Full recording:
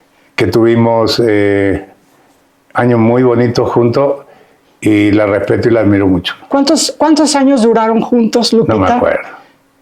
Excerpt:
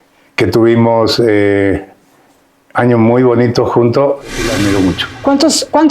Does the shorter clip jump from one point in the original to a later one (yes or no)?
yes